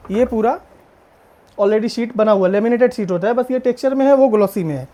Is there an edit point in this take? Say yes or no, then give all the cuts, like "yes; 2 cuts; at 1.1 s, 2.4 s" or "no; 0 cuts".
no; 0 cuts